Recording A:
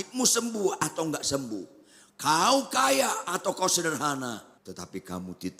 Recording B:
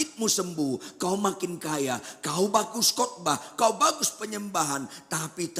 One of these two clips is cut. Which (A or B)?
A